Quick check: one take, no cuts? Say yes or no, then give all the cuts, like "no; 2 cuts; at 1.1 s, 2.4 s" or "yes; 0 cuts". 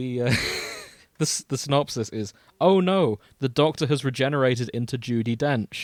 yes; 0 cuts